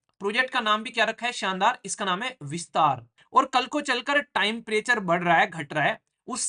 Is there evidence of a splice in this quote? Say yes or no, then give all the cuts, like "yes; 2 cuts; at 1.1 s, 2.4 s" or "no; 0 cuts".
yes; 1 cut; at 3.1 s